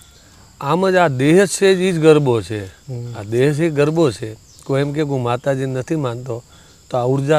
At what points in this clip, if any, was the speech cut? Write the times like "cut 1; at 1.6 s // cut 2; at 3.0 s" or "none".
none